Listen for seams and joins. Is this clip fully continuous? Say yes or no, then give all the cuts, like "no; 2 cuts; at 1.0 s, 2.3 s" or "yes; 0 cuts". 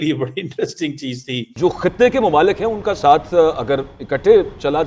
no; 1 cut; at 1.4 s